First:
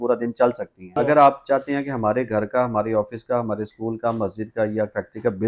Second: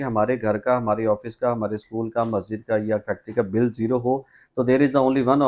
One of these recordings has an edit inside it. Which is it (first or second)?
first